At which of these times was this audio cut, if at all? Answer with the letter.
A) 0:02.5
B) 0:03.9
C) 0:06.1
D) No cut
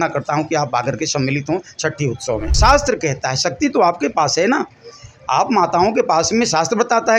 A